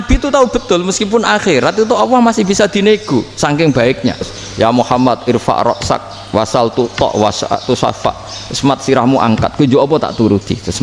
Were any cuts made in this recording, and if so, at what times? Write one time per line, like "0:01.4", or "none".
0:04.4